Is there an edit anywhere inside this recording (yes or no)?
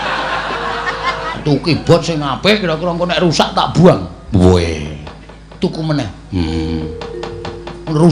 yes